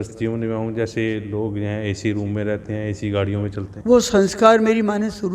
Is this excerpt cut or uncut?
cut